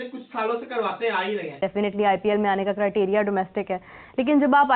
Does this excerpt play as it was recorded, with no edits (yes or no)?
no